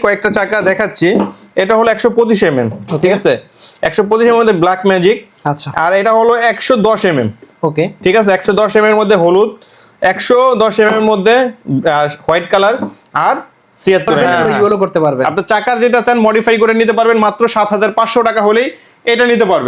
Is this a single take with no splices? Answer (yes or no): no